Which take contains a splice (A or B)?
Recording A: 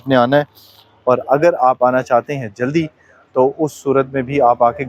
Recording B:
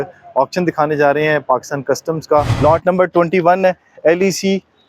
B